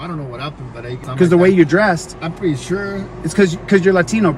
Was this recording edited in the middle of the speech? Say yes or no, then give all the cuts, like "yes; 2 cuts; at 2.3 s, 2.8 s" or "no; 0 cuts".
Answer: yes; 1 cut; at 1.0 s